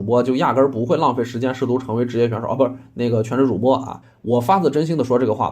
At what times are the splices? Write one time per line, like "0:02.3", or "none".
0:04.0